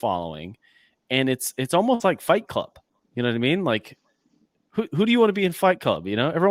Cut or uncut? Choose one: uncut